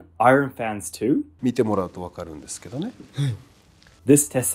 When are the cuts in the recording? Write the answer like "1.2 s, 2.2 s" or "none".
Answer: 1.3 s